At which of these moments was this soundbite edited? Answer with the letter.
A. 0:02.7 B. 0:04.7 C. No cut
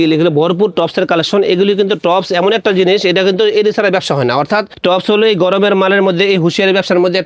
B